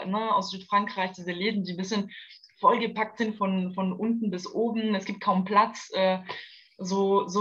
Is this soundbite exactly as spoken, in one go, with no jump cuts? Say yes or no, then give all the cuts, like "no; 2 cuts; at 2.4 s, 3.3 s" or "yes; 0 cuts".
yes; 0 cuts